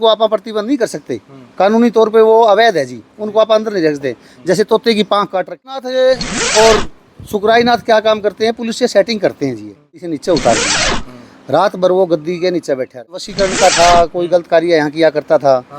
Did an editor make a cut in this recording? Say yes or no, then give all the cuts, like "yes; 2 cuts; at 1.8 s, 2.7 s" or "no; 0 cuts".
yes; 3 cuts; at 5.7 s, 10.1 s, 13.3 s